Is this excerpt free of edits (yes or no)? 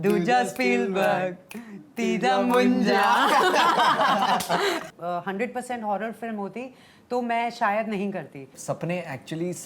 no